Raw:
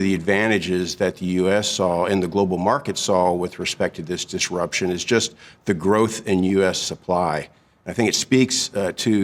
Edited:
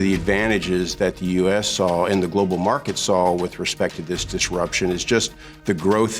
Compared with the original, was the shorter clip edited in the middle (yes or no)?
no